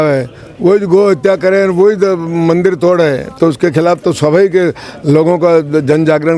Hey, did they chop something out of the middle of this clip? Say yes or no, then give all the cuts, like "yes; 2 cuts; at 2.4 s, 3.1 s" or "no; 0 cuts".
no; 0 cuts